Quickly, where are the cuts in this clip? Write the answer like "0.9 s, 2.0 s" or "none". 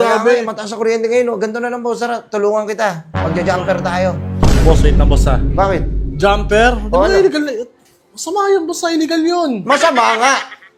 none